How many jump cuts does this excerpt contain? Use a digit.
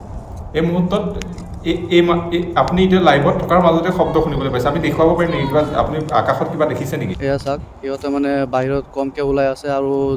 1